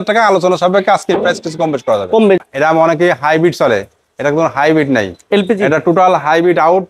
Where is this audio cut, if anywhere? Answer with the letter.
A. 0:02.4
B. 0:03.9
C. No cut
A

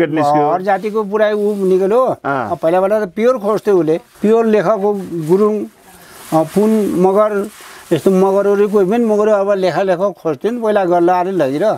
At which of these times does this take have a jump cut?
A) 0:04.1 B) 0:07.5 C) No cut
A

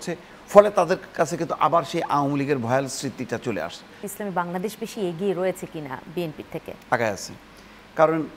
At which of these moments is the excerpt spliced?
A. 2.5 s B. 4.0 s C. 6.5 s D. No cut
B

